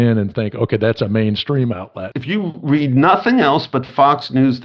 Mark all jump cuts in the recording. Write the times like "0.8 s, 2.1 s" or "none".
2.1 s